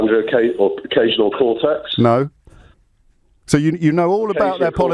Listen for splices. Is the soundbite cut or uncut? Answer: uncut